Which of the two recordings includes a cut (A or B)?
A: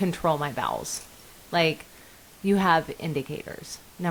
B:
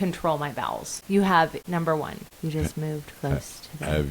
B